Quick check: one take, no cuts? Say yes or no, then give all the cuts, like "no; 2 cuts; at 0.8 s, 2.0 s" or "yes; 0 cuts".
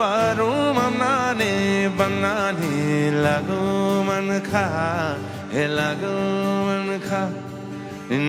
yes; 0 cuts